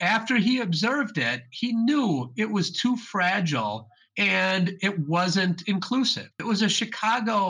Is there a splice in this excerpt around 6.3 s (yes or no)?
yes